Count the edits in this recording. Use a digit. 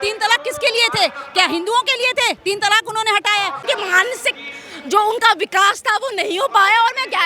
1